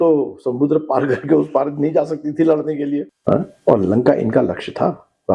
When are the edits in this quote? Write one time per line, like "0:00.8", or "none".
0:03.1